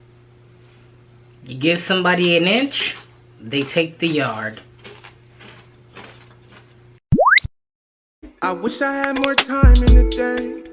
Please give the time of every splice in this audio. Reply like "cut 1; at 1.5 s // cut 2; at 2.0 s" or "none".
cut 1; at 7.0 s